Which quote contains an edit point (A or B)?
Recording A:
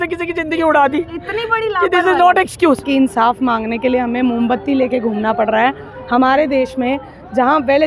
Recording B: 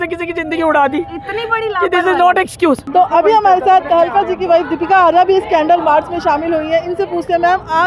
A